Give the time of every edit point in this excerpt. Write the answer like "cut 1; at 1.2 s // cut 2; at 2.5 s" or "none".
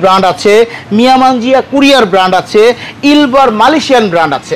none